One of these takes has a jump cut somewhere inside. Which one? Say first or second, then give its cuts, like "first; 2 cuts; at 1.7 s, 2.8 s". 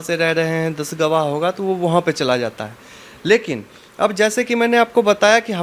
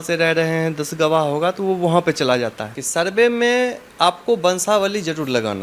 second; 1 cut; at 2.8 s